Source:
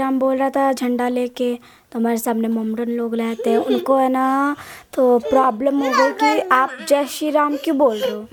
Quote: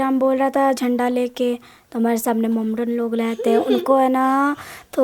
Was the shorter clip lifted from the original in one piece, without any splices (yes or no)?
yes